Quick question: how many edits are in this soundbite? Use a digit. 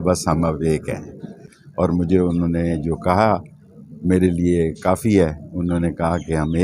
1